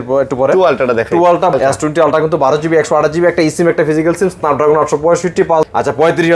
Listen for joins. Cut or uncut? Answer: cut